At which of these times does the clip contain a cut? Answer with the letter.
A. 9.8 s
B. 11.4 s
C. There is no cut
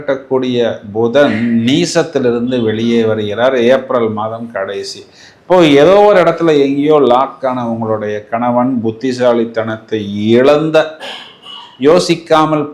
C